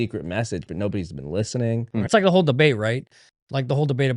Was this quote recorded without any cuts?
no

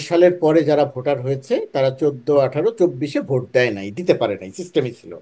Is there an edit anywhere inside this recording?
no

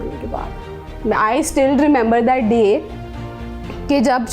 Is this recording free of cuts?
yes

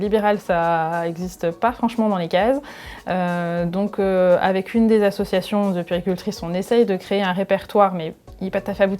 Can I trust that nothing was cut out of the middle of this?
yes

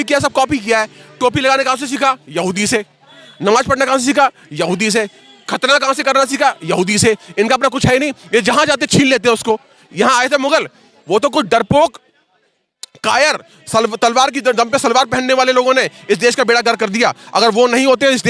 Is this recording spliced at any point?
no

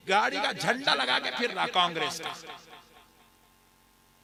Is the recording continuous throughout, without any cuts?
yes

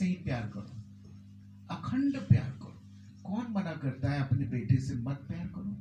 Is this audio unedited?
yes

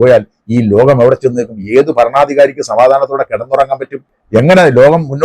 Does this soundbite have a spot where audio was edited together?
no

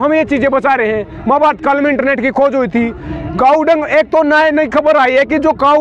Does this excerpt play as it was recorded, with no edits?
yes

